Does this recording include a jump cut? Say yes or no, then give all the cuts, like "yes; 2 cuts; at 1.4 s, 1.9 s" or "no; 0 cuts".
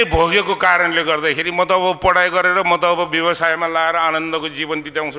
no; 0 cuts